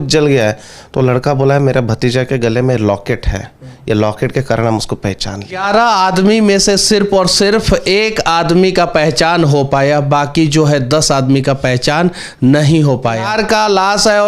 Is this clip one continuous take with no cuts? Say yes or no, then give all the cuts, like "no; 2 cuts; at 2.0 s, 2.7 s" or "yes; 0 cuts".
no; 2 cuts; at 5.6 s, 13.3 s